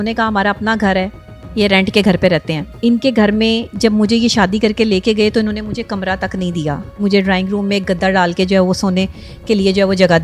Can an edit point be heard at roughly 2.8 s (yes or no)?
no